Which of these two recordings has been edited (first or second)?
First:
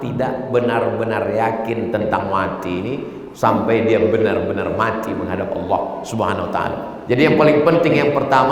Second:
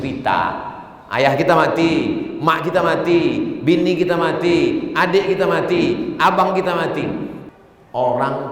second